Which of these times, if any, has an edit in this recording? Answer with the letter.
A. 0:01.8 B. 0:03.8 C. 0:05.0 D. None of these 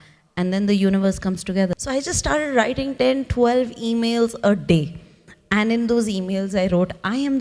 A